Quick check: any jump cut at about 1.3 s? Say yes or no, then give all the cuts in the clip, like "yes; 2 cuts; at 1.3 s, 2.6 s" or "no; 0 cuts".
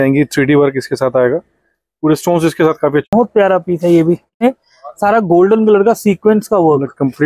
no; 2 cuts; at 3.1 s, 4.4 s